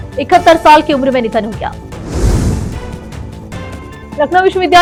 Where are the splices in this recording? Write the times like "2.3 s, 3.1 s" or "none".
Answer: none